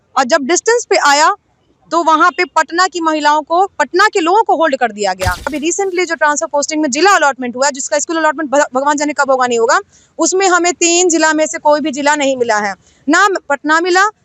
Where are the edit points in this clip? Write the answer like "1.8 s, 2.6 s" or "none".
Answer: 5.6 s